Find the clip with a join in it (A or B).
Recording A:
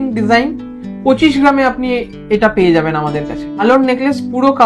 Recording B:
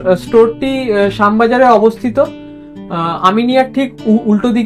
A